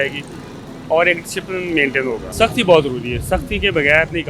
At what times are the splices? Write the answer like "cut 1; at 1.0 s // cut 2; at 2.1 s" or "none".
cut 1; at 2.3 s